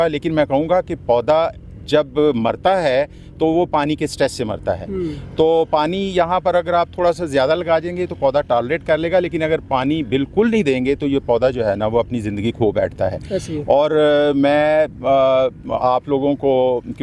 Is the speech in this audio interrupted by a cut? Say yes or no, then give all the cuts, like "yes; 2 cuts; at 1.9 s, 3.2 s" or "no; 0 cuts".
no; 0 cuts